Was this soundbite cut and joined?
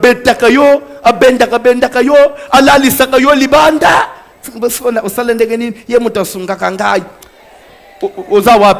no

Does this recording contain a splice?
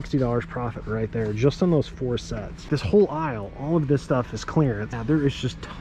yes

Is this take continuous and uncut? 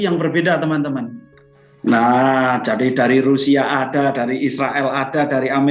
yes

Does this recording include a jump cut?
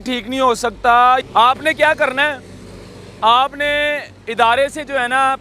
yes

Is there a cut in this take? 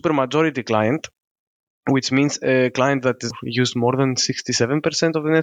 yes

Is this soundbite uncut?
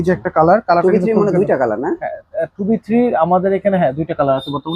yes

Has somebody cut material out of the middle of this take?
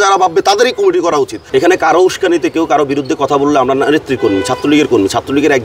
yes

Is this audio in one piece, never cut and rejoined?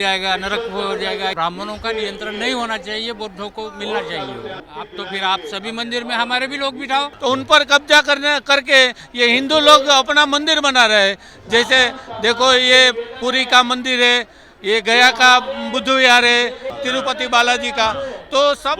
no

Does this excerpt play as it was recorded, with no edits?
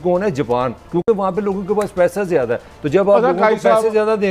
yes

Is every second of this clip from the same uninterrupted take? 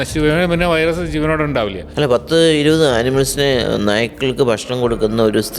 no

